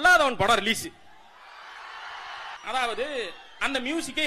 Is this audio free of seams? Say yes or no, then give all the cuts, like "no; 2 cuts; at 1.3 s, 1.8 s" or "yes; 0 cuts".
no; 1 cut; at 2.6 s